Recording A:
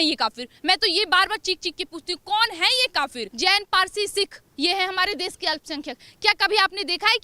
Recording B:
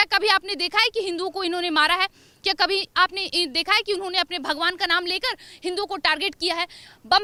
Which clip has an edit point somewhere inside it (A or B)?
A